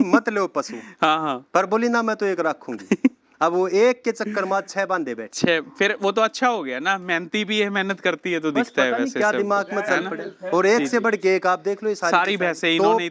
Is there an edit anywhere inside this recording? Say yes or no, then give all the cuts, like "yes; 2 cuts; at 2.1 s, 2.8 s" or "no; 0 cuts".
no; 0 cuts